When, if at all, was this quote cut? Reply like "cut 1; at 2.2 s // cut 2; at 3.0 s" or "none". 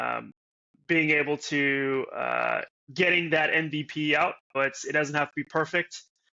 cut 1; at 2.8 s // cut 2; at 4.5 s